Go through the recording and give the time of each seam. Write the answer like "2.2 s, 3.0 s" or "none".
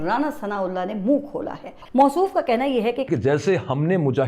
1.7 s, 3.1 s